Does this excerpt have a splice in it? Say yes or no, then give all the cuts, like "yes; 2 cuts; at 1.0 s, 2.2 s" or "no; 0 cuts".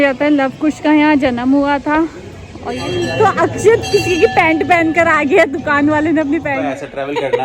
yes; 2 cuts; at 2.7 s, 6.6 s